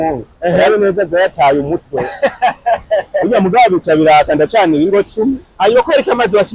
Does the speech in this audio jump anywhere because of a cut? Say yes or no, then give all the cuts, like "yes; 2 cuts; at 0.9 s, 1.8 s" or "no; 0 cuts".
yes; 1 cut; at 5.5 s